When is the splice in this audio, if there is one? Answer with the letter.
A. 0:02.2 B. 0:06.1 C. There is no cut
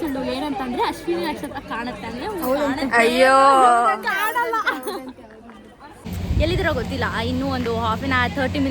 B